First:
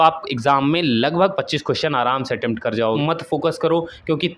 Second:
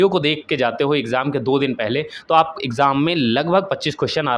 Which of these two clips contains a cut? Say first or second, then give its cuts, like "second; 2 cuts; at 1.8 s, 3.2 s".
first; 1 cut; at 3.0 s